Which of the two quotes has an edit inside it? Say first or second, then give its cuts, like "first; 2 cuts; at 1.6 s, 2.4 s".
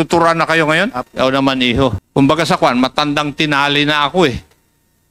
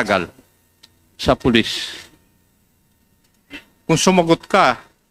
first; 2 cuts; at 1.0 s, 2.0 s